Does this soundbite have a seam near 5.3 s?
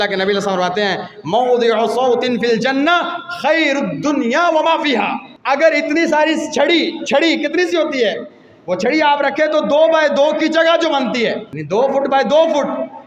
yes; 2 cuts; at 5.3 s, 11.5 s

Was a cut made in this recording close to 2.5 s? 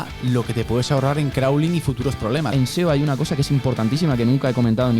yes; 1 cut; at 2.5 s

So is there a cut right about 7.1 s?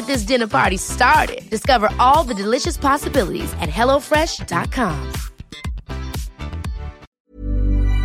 yes; 1 cut; at 7.1 s

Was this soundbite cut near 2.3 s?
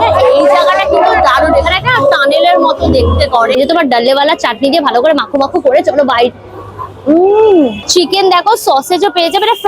no; 2 cuts; at 3.6 s, 7.9 s

